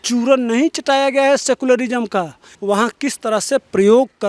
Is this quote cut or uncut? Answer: cut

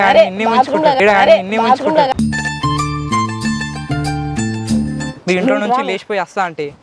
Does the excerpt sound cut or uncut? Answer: cut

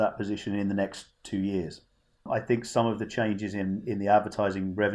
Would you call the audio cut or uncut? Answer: cut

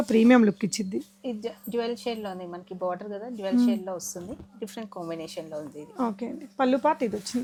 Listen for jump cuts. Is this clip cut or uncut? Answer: uncut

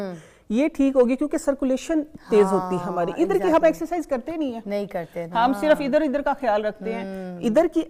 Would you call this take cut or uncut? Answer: uncut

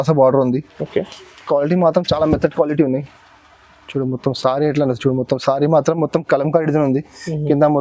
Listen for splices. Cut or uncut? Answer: uncut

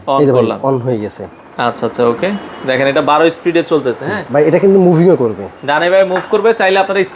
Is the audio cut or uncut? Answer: uncut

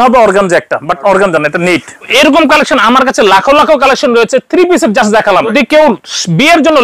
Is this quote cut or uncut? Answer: cut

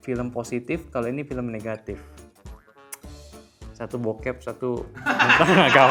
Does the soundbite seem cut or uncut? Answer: uncut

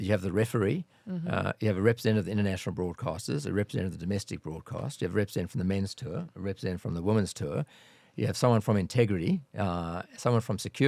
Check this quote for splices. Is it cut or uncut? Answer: uncut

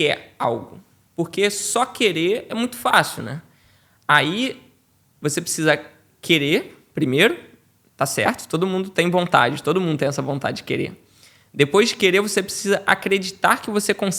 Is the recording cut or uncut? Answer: uncut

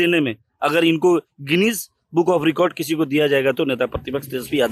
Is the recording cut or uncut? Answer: uncut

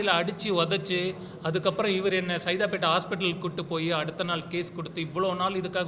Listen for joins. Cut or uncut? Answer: uncut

